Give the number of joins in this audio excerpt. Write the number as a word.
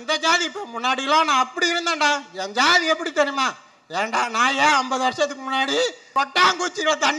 zero